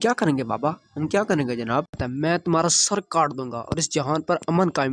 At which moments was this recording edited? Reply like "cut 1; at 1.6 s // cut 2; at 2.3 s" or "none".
cut 1; at 2.0 s